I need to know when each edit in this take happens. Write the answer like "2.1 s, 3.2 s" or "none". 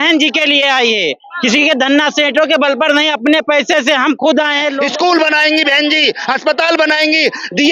4.8 s

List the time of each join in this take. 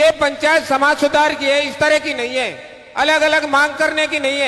none

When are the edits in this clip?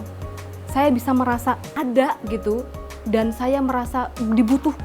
1.7 s

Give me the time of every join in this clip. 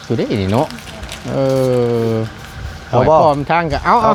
none

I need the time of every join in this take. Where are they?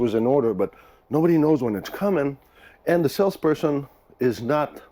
none

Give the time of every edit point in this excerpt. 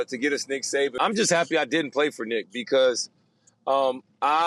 1.0 s

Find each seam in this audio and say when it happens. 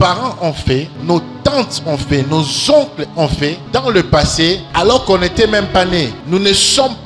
0.9 s, 3.6 s, 4.7 s, 6.2 s

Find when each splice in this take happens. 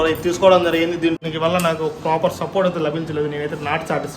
1.2 s

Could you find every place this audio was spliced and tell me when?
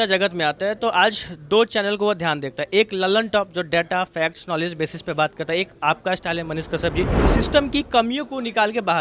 none

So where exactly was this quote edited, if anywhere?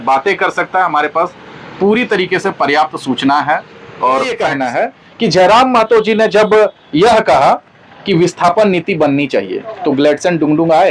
4.5 s

